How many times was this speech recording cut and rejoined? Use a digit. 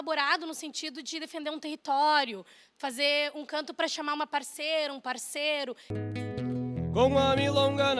1